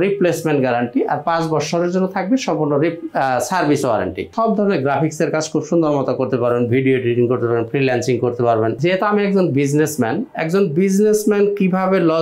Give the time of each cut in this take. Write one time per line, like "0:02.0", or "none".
0:04.3
0:08.8